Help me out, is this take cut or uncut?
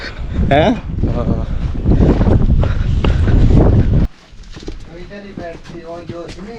cut